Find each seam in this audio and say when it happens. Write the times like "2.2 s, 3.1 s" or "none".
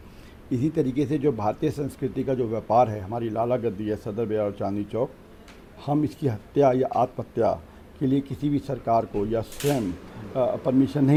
none

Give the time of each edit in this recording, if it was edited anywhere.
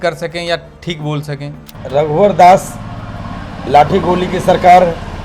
1.7 s

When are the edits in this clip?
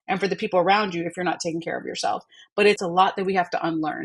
2.8 s

